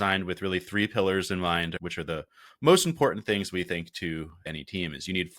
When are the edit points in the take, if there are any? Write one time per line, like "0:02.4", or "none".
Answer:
0:01.8
0:04.5